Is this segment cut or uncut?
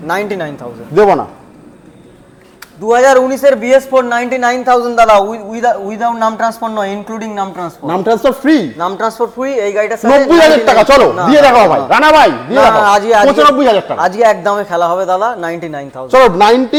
uncut